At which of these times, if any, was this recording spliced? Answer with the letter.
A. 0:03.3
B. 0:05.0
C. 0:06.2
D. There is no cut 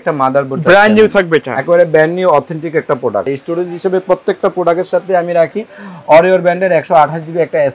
A